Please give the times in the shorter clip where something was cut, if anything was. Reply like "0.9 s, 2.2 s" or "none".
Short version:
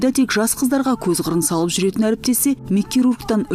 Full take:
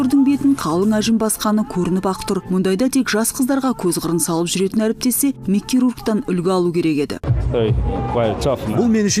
none